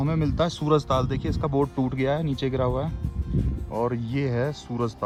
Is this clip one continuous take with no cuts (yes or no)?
yes